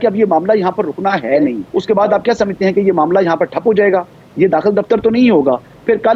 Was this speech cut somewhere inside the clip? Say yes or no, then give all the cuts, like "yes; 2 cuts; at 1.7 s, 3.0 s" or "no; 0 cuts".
yes; 1 cut; at 1.7 s